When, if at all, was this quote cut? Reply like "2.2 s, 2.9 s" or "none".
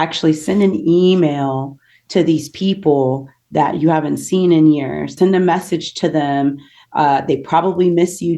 5.1 s